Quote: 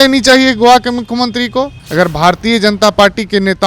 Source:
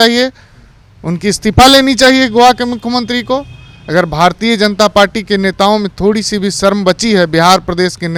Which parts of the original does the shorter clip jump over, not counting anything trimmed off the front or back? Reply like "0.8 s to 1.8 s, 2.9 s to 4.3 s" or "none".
3.5 s to 3.8 s